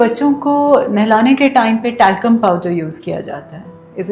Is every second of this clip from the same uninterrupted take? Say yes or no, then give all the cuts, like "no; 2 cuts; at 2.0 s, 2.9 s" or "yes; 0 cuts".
yes; 0 cuts